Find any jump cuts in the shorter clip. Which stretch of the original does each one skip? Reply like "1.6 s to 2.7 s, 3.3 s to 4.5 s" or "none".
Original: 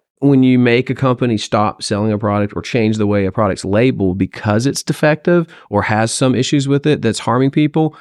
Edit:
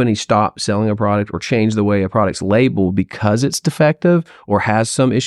none